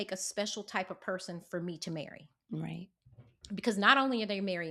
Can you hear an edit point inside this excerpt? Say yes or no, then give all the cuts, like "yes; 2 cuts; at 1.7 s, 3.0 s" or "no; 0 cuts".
no; 0 cuts